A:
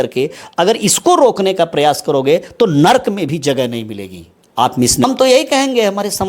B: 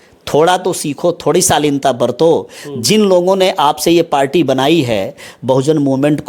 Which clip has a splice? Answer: A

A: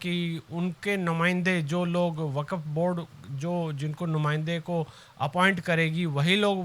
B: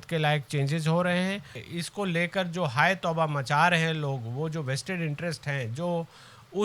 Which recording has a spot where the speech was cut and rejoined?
B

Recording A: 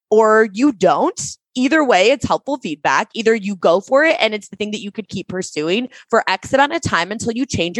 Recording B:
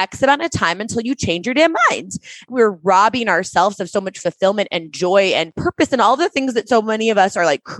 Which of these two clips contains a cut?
B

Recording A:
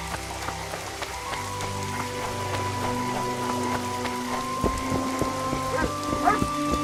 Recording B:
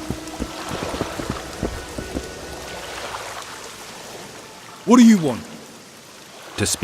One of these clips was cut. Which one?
B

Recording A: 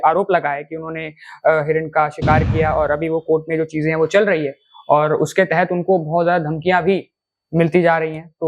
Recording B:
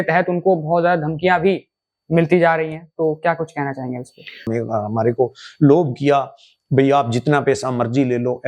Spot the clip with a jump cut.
B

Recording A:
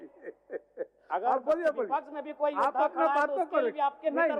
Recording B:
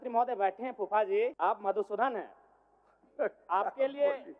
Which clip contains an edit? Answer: B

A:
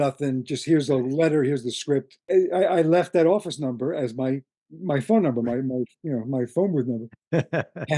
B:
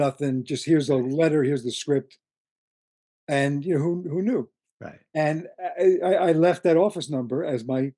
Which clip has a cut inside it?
A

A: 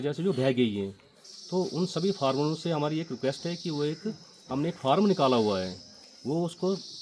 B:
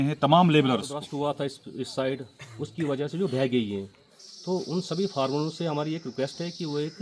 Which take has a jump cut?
B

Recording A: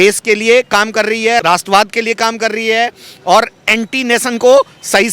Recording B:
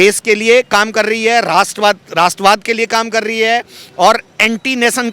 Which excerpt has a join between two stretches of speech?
A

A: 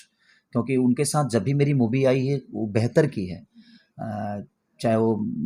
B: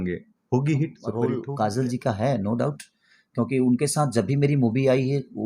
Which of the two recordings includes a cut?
B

